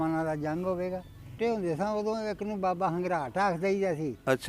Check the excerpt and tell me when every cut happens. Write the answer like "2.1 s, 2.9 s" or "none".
1.4 s